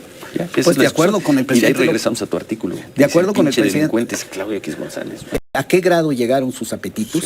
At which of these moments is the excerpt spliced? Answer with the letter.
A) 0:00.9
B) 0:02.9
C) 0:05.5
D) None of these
C